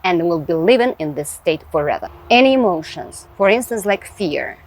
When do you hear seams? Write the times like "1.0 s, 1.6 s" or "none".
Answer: 2.1 s